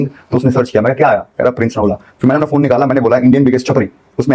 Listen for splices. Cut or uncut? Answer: uncut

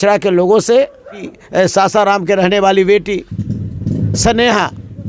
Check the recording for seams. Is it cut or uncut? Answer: cut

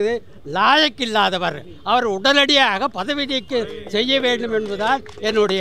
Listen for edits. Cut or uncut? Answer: uncut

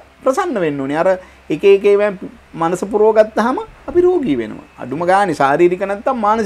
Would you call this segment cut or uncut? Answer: uncut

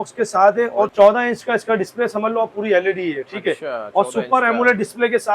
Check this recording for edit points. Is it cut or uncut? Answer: cut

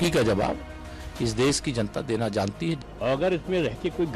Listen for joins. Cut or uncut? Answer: cut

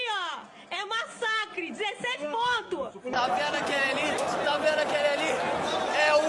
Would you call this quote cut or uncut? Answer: cut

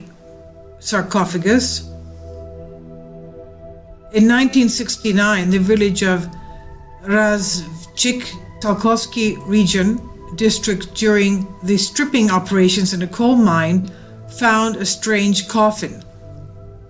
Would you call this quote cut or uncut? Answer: cut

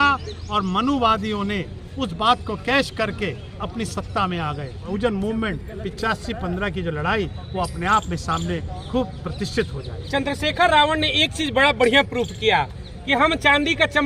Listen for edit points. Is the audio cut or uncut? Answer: cut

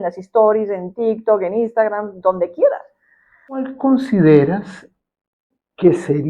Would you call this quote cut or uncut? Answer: cut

